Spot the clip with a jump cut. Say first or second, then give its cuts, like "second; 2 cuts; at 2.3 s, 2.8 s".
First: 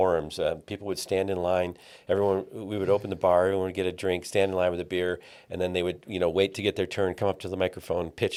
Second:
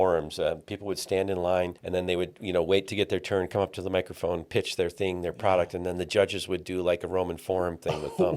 second; 1 cut; at 1.8 s